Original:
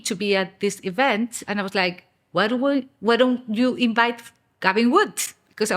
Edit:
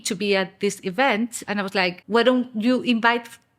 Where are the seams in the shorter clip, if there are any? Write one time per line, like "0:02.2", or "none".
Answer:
0:02.0

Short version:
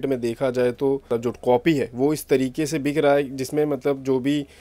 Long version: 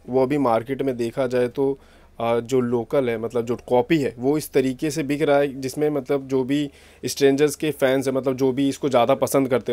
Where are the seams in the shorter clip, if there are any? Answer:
0:01.0

